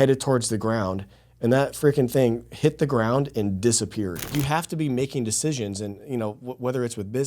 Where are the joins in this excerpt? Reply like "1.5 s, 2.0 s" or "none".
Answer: 4.3 s